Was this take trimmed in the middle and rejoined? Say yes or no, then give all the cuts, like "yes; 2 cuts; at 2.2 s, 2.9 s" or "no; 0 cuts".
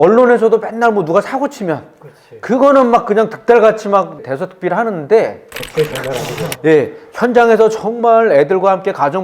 no; 0 cuts